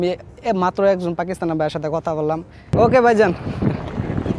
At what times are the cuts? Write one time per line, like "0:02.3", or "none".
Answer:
0:02.7